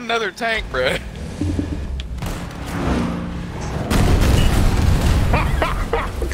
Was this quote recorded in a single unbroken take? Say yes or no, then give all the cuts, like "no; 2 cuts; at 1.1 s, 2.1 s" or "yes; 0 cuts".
yes; 0 cuts